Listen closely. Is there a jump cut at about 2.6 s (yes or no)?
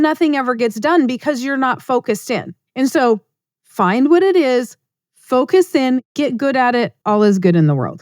yes